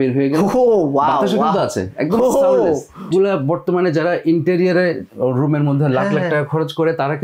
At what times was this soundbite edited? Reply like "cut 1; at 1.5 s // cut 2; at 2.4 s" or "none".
cut 1; at 3.1 s